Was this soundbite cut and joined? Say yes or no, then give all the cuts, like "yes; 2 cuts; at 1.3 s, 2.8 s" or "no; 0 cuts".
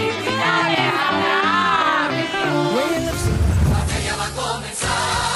yes; 1 cut; at 3.5 s